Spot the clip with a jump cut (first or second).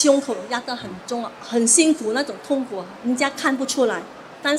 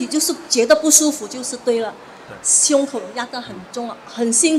first